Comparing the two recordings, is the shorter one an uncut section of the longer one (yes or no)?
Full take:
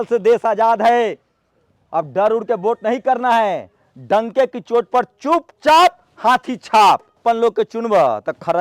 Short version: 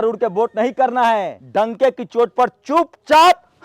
no